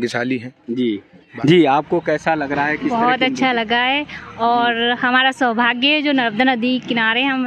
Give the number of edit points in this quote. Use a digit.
1